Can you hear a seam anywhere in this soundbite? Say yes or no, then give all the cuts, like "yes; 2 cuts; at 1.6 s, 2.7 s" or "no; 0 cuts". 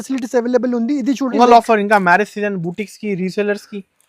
yes; 1 cut; at 1.3 s